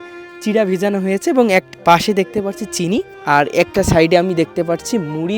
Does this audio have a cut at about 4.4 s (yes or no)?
no